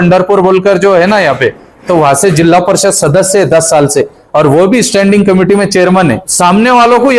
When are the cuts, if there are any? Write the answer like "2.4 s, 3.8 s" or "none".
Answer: 6.3 s